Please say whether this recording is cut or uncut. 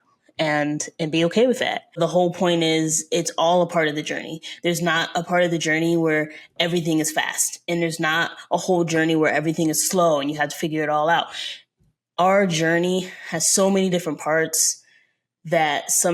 cut